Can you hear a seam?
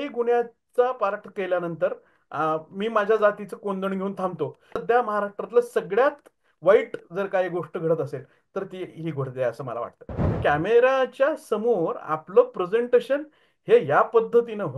yes; 2 cuts; at 4.8 s, 10.3 s

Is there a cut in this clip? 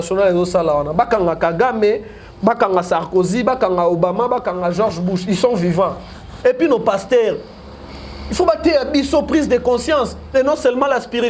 yes; 1 cut; at 6.3 s

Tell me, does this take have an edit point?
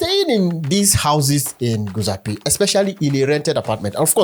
no; 0 cuts

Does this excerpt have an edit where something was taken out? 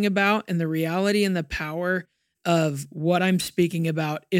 no; 0 cuts

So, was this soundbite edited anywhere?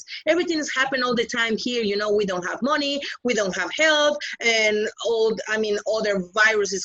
no; 0 cuts

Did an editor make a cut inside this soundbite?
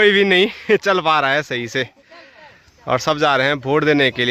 no; 0 cuts

